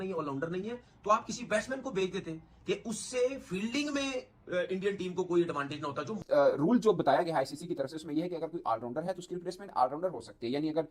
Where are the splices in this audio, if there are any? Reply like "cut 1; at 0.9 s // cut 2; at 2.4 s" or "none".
cut 1; at 6.2 s